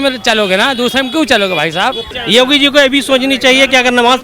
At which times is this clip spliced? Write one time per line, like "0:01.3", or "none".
0:02.1